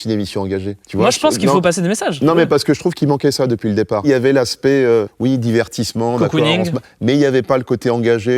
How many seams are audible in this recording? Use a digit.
0